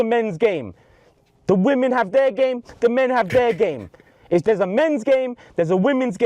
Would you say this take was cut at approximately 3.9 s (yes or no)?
yes